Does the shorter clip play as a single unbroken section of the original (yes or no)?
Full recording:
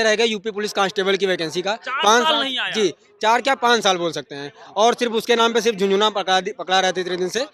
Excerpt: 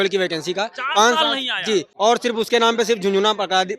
no